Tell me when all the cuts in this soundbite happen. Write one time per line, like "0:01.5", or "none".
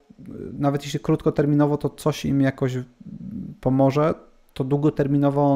none